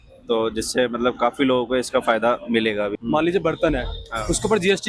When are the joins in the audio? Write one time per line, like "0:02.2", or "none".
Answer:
0:03.0